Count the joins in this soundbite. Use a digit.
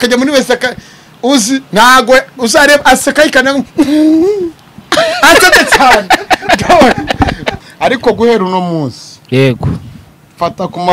1